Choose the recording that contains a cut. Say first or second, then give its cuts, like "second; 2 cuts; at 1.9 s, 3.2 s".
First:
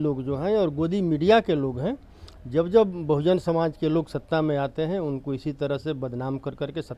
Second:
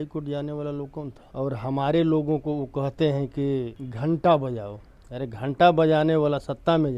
second; 2 cuts; at 1.2 s, 3.8 s